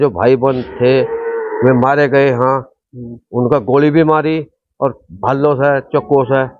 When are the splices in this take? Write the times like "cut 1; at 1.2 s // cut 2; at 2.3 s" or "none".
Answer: none